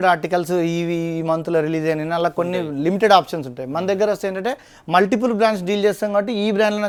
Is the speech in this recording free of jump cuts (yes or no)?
yes